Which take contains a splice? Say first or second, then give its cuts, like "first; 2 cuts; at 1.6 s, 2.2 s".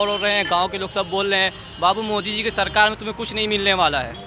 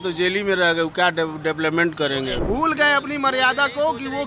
second; 1 cut; at 2.4 s